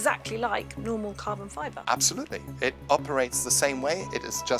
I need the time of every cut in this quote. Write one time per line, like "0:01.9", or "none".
0:01.8
0:02.8